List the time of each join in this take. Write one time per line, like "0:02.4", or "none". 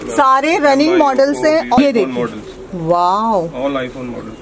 0:01.8